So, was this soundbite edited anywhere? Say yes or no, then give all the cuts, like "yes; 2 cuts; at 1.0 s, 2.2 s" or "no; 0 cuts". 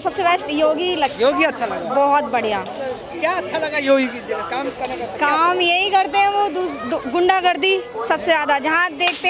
no; 0 cuts